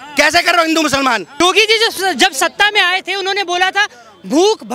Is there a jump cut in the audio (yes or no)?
yes